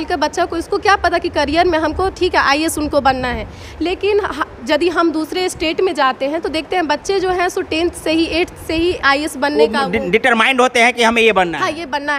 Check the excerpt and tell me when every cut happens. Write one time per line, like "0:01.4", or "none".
none